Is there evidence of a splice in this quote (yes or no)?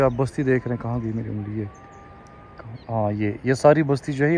no